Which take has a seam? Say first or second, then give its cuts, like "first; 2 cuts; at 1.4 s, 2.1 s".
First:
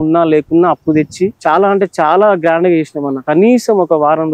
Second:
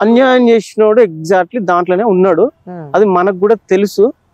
first; 2 cuts; at 1.4 s, 3.3 s